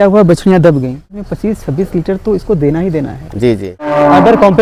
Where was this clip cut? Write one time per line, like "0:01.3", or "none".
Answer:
0:01.3
0:03.9